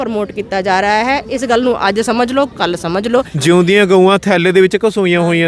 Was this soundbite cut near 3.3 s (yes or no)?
yes